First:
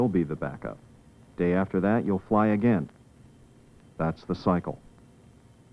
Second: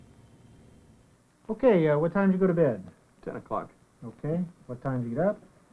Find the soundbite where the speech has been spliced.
first; 1 cut; at 2.3 s

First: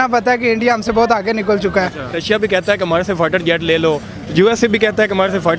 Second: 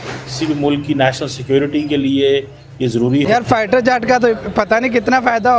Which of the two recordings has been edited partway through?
second; 1 cut; at 2.8 s

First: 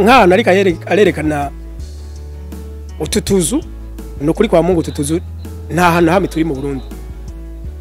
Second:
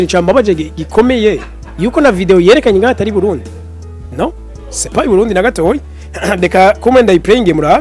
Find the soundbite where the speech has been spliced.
first; 1 cut; at 6.8 s

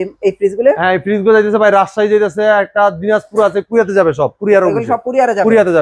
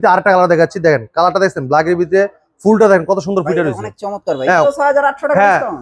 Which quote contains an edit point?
second; 1 cut; at 4.6 s

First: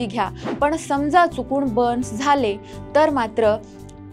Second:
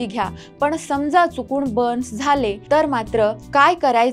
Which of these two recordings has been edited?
second; 1 cut; at 2.9 s

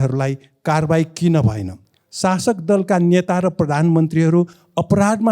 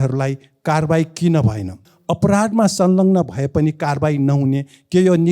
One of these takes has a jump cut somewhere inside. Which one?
second; 1 cut; at 2.0 s

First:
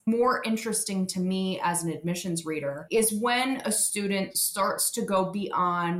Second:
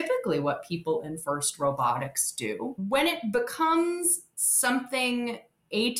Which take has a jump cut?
second; 1 cut; at 2.8 s

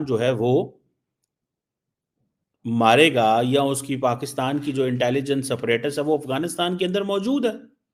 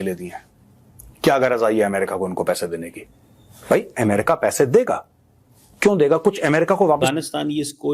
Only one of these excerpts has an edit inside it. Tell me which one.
second; 1 cut; at 7.0 s

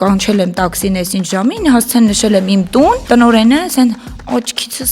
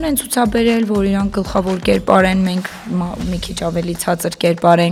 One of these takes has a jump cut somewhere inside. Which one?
first; 1 cut; at 3.0 s

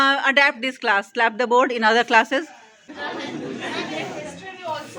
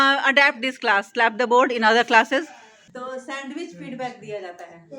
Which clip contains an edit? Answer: second; 1 cut; at 2.9 s

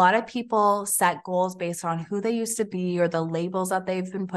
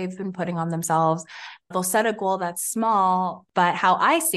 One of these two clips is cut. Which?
second; 2 cuts; at 1.5 s, 3.4 s

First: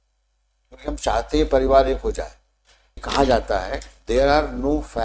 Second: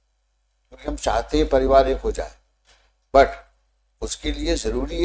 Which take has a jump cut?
first; 1 cut; at 3.0 s

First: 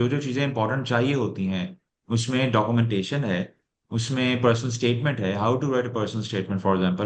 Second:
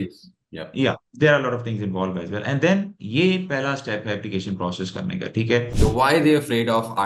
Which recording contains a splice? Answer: second; 1 cut; at 5.7 s

